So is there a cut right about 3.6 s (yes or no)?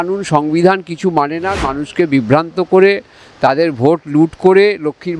no